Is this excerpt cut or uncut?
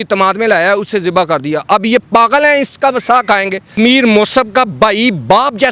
cut